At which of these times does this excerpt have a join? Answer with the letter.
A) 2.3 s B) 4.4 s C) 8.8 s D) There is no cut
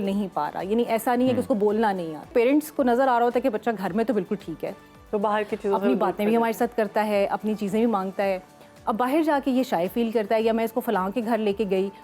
A